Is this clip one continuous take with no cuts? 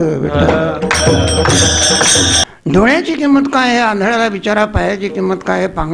no; 1 cut; at 2.4 s

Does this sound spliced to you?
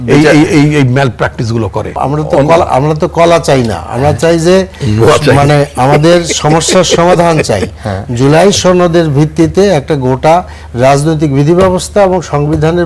yes; 1 cut; at 1.9 s

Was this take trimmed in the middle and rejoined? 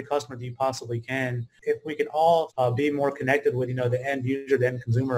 yes; 2 cuts; at 1.5 s, 2.5 s

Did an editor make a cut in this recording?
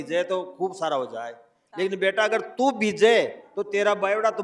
no; 0 cuts

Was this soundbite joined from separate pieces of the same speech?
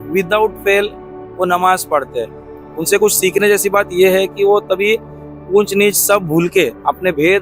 no; 0 cuts

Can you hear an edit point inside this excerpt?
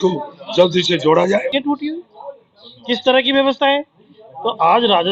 yes; 1 cut; at 1.5 s

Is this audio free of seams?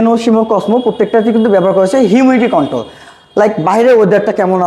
yes; 0 cuts

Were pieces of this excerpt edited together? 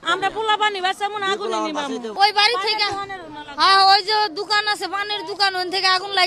no; 0 cuts

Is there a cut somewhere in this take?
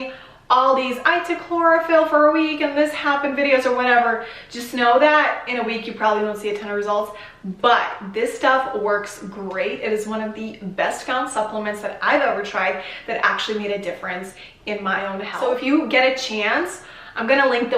no; 0 cuts

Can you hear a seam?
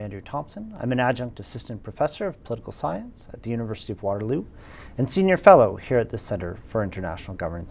yes; 1 cut; at 2.7 s

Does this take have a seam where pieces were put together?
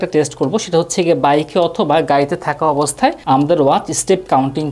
no; 0 cuts

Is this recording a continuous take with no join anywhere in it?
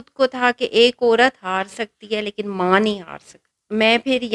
yes; 0 cuts

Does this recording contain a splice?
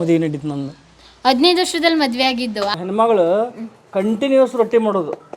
yes; 1 cut; at 2.7 s

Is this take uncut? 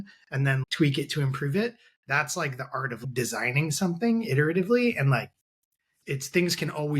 no; 1 cut; at 5.9 s

